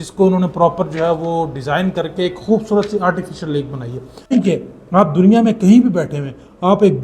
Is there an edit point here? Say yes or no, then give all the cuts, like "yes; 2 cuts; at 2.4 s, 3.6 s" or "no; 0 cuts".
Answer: yes; 1 cut; at 4.3 s